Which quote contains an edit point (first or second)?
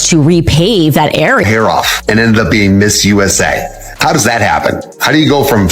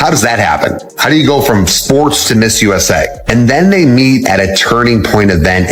first